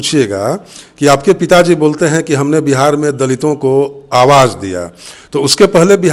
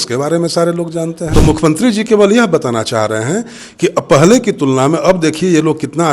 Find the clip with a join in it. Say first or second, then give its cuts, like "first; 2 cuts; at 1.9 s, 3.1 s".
second; 1 cut; at 1.2 s